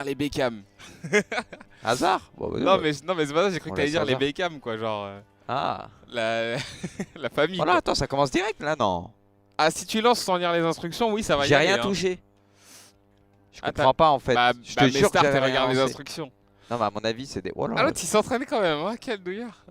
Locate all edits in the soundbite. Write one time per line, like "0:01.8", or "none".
0:01.3

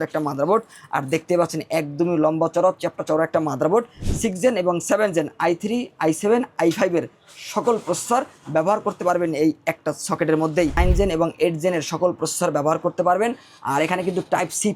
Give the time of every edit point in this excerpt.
0:04.0
0:10.8

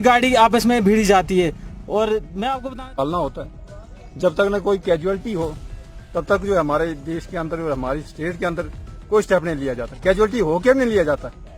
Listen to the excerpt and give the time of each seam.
0:02.6

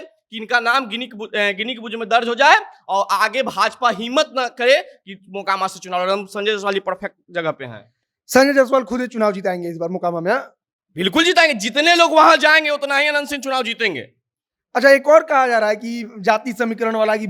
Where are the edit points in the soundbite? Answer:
none

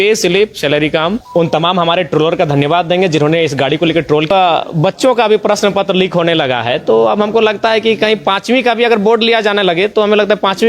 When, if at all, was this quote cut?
0:01.2
0:04.3

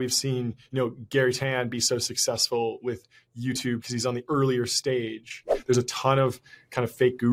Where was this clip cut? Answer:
0:05.5

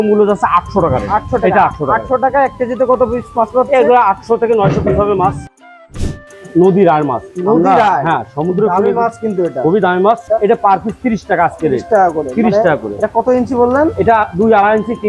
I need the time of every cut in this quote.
0:05.9
0:10.2

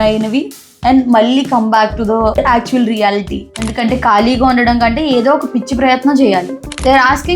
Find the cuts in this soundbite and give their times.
0:02.4
0:03.7
0:06.6

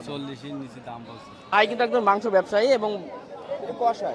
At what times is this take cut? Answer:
0:01.5

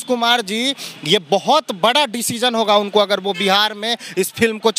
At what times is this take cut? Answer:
none

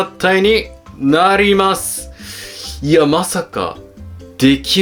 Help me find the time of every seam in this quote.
none

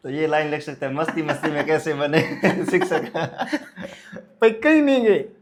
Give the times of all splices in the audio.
none

